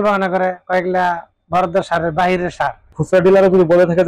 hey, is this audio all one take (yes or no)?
no